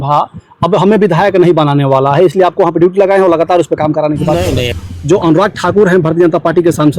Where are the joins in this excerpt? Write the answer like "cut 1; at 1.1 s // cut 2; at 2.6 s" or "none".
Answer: cut 1; at 4.7 s